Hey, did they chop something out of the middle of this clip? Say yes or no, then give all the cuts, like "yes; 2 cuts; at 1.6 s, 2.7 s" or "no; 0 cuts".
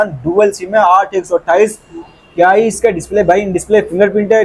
no; 0 cuts